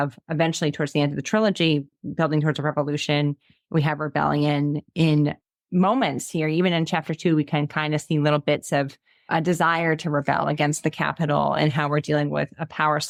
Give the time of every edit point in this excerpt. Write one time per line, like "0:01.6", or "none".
none